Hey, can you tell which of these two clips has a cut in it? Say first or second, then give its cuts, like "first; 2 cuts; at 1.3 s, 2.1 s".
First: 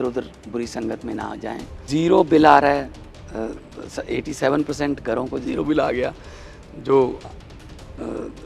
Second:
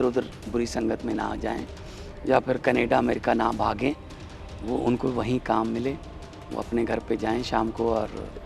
first; 1 cut; at 1.7 s